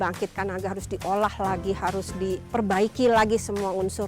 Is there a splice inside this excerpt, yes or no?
yes